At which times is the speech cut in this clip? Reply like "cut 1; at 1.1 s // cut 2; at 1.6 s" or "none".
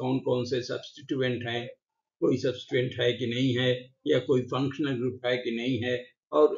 cut 1; at 3.7 s